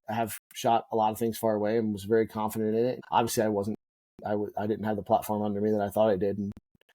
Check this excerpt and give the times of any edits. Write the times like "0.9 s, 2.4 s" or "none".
3.0 s

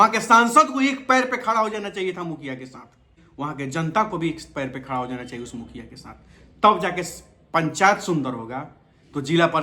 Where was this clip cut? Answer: 3.2 s

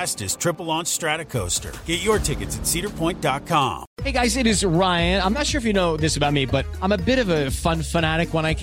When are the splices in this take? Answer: 3.9 s

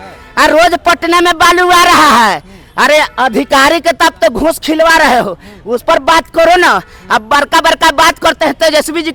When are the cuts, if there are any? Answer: none

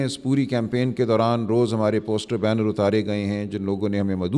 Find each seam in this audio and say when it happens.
none

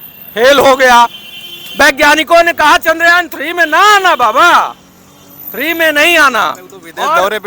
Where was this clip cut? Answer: none

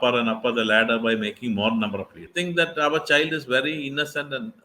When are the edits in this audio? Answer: 2.3 s

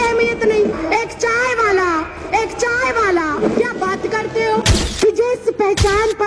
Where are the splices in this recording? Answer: 0.8 s, 3.4 s, 4.8 s

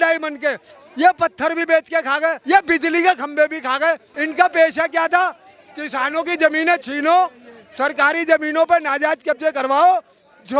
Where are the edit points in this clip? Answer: 2.4 s, 4.1 s

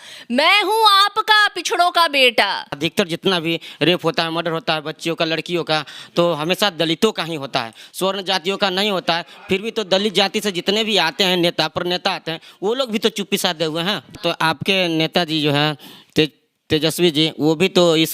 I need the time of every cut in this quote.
2.7 s, 14.1 s

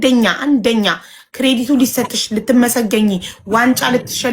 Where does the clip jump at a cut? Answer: none

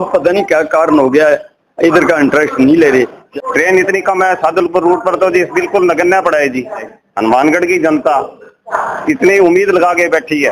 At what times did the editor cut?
3.2 s, 6.8 s

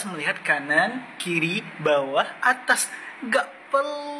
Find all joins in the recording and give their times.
none

